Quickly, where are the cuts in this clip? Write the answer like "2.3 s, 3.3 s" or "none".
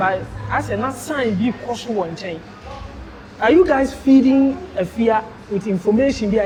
none